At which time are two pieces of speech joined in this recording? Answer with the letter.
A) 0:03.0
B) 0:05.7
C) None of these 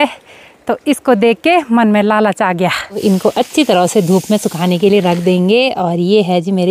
A